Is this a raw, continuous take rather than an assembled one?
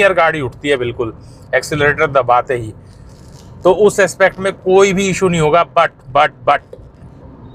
yes; 0 cuts

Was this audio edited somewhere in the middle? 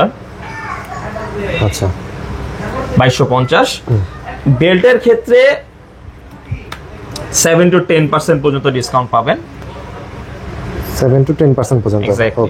no; 0 cuts

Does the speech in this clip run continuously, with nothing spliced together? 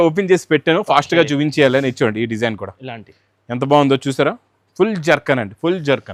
yes; 0 cuts

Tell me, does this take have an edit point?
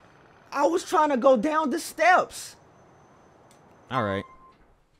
no; 0 cuts

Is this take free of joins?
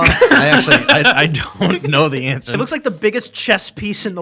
no; 1 cut; at 2.5 s

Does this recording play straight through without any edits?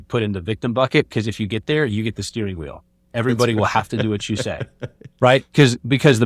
yes; 0 cuts

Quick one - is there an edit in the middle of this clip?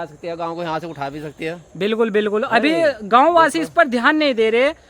no; 0 cuts

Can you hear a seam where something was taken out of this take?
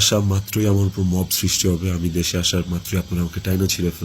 no; 0 cuts

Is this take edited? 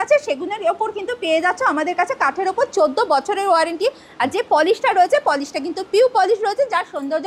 no; 0 cuts

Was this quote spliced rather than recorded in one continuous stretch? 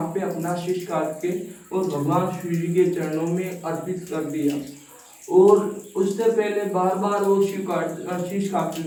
no; 0 cuts

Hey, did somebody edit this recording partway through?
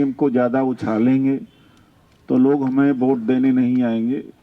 no; 0 cuts

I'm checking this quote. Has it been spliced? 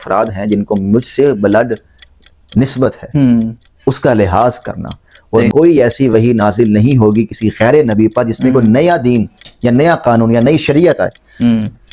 yes; 1 cut; at 5.5 s

